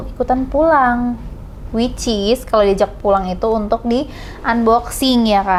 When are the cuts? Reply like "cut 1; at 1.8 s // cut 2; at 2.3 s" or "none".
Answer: none

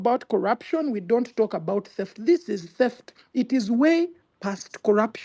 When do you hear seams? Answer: none

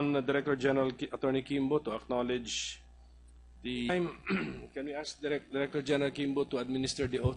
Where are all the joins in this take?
none

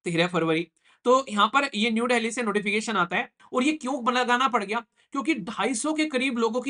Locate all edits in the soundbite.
cut 1; at 3.4 s

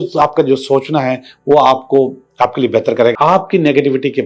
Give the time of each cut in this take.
cut 1; at 3.1 s

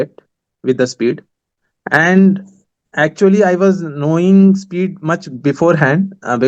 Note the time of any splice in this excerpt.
none

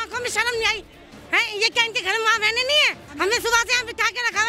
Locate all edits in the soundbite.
cut 1; at 3.0 s

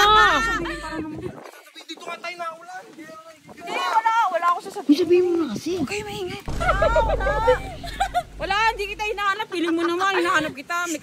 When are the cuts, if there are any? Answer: cut 1; at 6.6 s

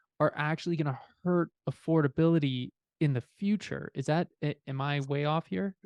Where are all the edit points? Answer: none

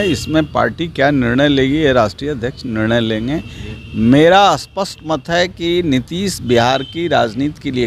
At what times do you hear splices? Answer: none

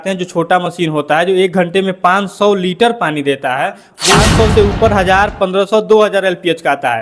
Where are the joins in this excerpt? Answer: cut 1; at 3.9 s

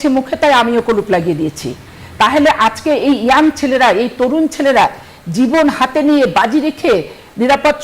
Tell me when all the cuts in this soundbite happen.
none

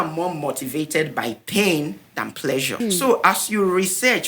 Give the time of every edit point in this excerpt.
cut 1; at 2.8 s

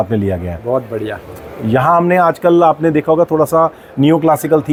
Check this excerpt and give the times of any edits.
none

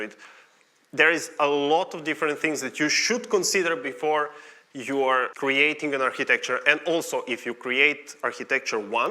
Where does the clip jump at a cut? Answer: cut 1; at 5.3 s

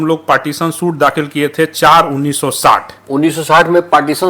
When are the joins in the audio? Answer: none

